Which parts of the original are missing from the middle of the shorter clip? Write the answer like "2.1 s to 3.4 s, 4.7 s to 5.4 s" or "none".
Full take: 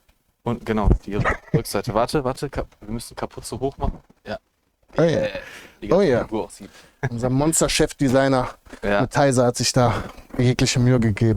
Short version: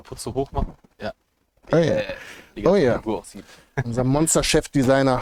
none